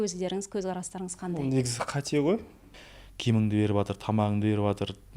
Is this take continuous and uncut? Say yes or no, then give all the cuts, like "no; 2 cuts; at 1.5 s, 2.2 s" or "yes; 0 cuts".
no; 1 cut; at 2.7 s